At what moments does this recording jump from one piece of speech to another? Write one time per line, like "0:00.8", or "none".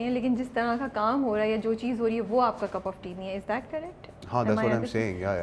none